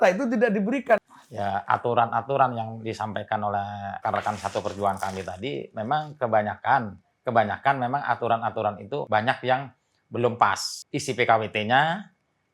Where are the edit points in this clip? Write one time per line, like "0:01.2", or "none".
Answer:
0:01.0
0:04.0
0:09.0
0:10.7

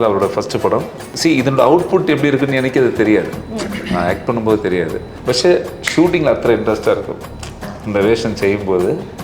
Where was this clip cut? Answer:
0:01.0
0:05.1

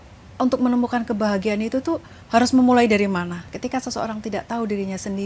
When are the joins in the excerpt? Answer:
0:03.4

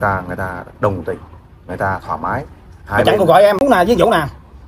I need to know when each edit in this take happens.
0:03.6

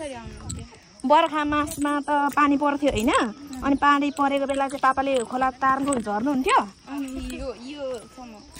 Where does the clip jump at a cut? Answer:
none

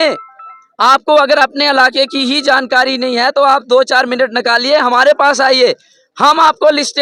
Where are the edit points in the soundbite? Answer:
none

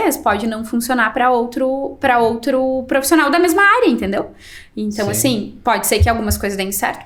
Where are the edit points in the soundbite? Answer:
none

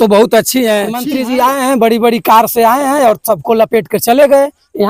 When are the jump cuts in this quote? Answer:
0:01.0

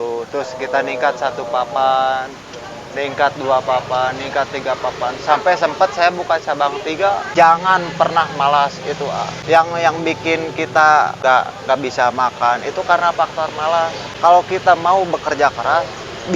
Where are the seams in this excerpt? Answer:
0:07.3
0:09.4
0:11.2
0:14.0

